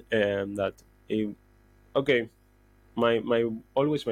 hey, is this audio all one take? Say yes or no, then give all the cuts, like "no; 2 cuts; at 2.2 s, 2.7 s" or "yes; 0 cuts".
yes; 0 cuts